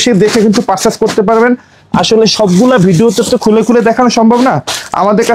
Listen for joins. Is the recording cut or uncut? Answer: uncut